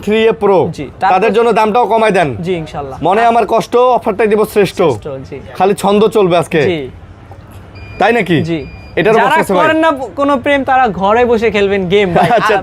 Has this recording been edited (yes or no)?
no